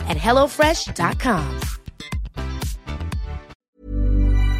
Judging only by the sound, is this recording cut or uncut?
cut